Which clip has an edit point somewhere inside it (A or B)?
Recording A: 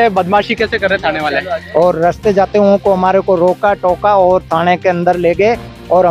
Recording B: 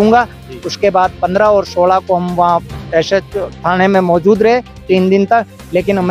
A